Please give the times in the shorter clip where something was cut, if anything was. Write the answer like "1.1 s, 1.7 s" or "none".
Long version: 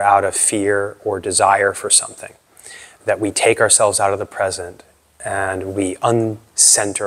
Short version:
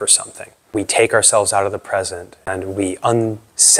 0.7 s, 2.5 s